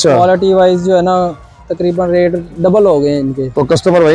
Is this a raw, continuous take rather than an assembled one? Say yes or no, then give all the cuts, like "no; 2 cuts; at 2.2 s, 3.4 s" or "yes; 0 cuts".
yes; 0 cuts